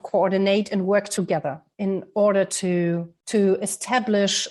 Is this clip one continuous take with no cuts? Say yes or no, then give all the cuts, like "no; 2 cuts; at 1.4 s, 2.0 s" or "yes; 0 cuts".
no; 1 cut; at 3.1 s